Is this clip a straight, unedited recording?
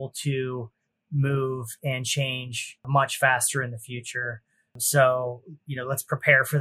no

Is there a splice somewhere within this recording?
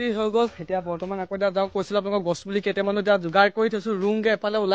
no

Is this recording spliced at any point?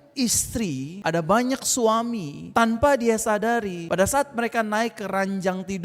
yes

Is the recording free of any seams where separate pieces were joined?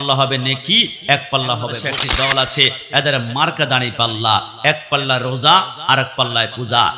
no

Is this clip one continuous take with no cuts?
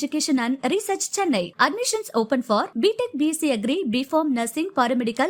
yes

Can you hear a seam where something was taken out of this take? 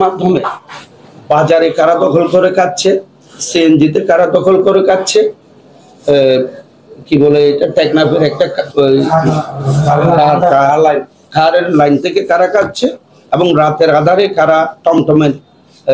no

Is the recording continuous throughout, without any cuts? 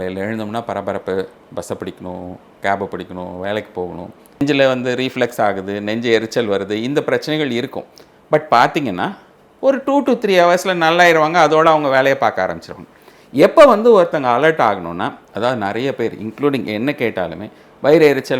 no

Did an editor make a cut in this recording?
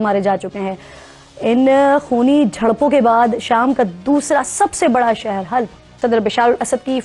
yes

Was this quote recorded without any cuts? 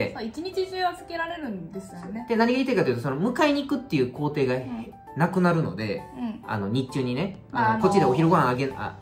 yes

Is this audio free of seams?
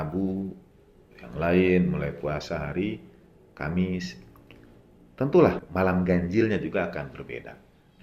no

